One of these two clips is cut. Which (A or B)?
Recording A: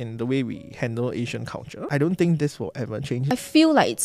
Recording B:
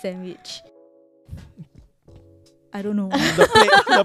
A